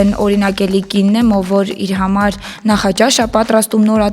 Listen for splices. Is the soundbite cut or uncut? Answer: uncut